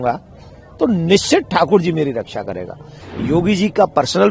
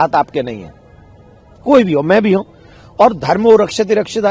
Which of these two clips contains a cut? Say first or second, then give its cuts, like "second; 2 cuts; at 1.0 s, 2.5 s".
first; 1 cut; at 3.0 s